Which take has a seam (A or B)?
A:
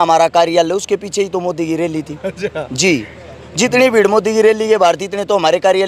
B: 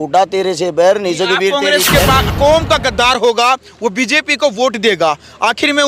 B